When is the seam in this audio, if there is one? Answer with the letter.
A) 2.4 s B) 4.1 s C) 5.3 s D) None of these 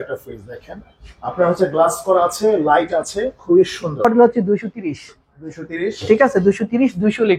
B